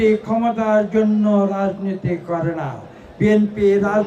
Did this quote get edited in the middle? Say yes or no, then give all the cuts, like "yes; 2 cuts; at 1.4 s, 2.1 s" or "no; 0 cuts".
no; 0 cuts